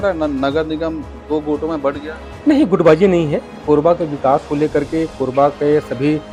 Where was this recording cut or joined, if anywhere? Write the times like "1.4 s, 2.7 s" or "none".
none

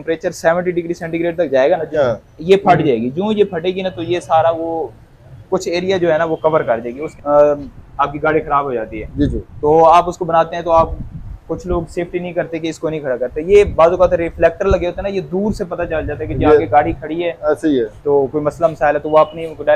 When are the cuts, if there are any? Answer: 2.0 s, 7.0 s

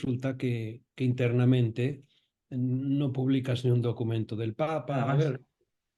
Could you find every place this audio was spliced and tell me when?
4.9 s

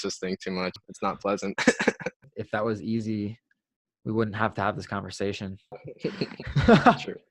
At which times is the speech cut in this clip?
0.9 s, 2.2 s, 5.8 s

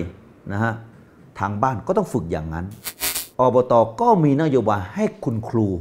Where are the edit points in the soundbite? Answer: 3.2 s

